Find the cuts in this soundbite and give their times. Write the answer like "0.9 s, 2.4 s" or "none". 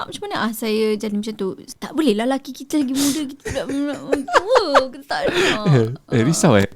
1.6 s